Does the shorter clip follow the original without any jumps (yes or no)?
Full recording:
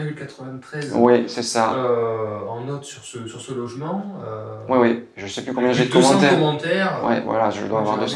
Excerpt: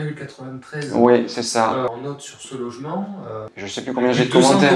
no